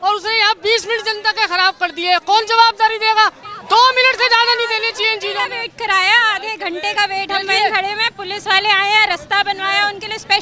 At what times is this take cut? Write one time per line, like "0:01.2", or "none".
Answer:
0:03.4